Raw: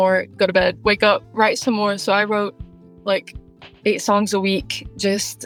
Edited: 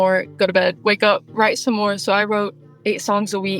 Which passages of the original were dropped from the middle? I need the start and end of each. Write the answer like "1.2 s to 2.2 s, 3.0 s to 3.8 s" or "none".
2.7 s to 3.7 s